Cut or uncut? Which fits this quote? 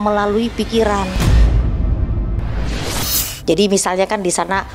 cut